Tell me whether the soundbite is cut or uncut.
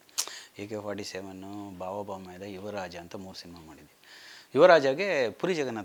uncut